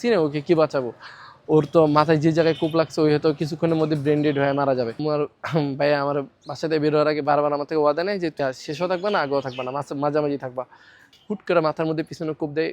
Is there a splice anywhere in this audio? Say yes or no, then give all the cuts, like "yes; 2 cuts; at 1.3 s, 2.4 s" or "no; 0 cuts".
yes; 3 cuts; at 5.0 s, 8.3 s, 11.0 s